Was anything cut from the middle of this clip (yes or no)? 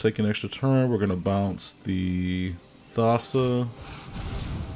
no